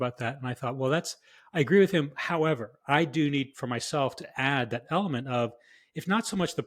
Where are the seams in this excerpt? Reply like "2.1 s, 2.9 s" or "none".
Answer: none